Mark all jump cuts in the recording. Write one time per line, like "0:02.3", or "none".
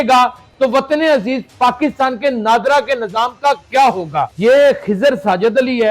0:04.3